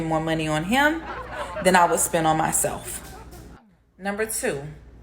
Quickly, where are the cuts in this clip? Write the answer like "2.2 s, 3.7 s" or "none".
2.9 s